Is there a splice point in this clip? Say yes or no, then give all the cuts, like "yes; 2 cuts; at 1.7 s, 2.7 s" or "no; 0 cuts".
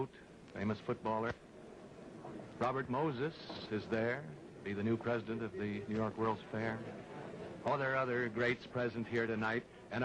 yes; 1 cut; at 2.4 s